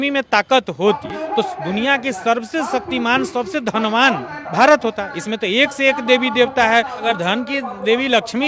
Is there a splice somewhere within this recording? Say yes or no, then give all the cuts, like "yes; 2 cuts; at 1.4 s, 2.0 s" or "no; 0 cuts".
yes; 3 cuts; at 1.1 s, 4.3 s, 7.0 s